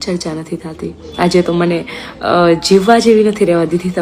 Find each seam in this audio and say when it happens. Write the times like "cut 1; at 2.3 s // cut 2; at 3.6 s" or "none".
cut 1; at 1.0 s